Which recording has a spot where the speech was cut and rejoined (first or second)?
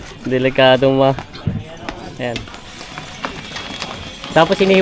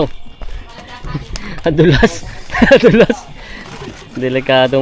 first